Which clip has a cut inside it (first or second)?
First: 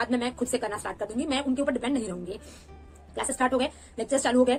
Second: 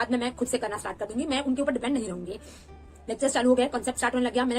second